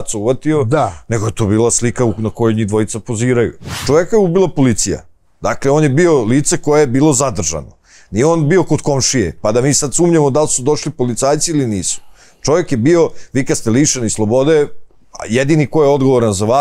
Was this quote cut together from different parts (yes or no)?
yes